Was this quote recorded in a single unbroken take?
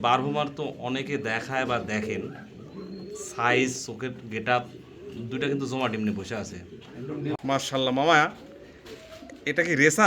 no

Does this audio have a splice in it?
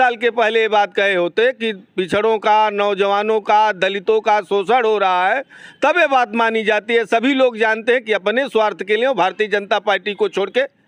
no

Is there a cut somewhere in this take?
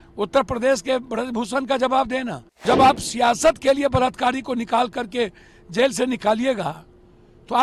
yes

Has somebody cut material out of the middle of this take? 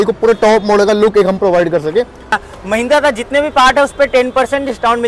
yes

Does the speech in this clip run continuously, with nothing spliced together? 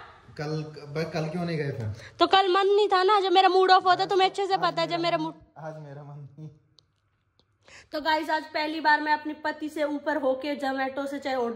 yes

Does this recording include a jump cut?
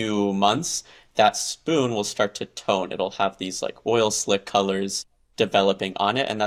no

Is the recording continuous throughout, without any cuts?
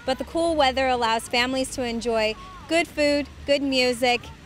yes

